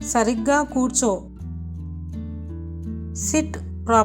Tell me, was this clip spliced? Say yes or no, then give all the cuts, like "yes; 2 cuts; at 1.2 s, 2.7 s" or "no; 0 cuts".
no; 0 cuts